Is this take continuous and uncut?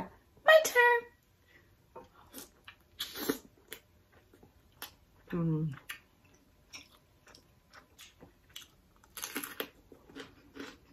no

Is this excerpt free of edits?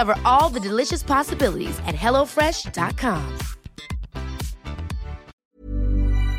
no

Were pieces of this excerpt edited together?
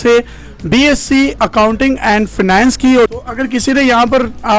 yes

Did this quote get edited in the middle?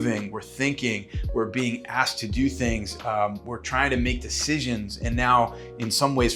no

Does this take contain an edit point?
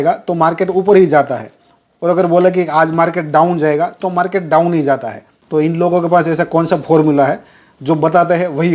no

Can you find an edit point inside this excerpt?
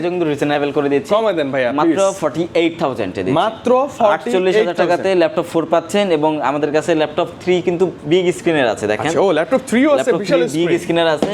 no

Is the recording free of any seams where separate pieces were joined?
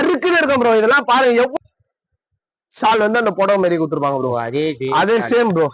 no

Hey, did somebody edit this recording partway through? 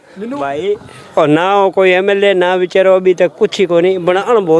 no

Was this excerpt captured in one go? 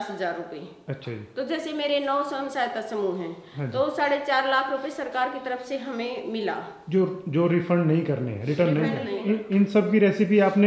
no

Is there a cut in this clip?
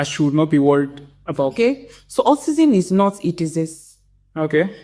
no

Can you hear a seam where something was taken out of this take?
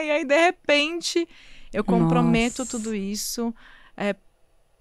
no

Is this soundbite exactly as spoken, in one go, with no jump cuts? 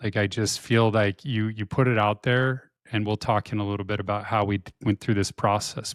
yes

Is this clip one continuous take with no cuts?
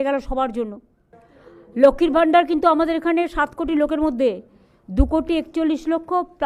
no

